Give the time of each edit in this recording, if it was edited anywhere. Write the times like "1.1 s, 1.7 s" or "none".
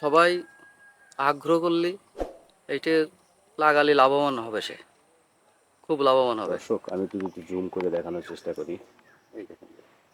6.5 s